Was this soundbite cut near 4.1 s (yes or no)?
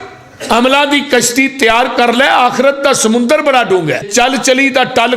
yes